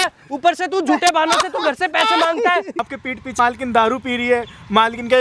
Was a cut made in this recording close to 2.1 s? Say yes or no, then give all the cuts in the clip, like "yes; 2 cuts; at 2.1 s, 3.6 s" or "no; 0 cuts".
no; 1 cut; at 3.3 s